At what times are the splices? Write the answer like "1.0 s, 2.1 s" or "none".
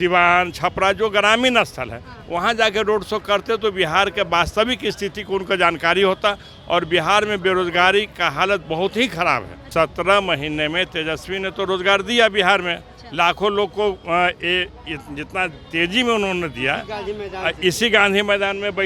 9.6 s